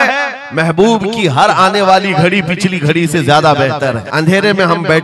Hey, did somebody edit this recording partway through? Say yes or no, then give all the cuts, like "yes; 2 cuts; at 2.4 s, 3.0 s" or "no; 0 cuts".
yes; 1 cut; at 4.0 s